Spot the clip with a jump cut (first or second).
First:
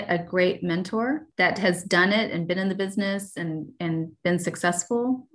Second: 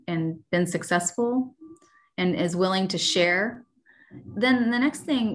first